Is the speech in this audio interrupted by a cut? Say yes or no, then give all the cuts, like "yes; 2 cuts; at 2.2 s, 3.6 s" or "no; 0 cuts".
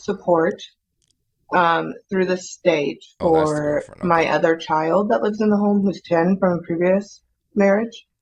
no; 0 cuts